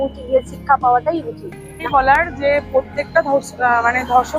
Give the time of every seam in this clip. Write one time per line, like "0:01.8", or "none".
0:01.7